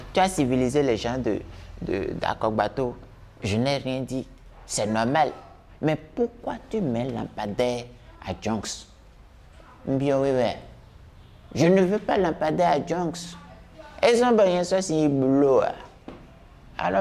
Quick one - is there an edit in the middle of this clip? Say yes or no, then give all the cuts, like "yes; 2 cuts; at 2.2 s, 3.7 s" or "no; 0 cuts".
no; 0 cuts